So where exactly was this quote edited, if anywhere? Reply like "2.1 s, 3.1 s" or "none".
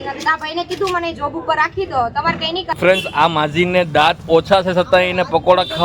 2.7 s